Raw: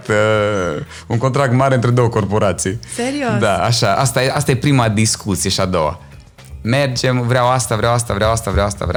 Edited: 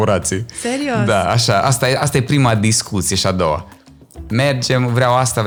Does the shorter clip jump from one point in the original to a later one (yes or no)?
no